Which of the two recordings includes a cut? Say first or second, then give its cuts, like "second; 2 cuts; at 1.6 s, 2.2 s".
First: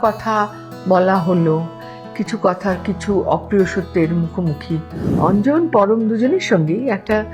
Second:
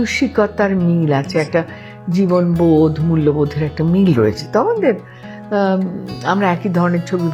first; 1 cut; at 5.0 s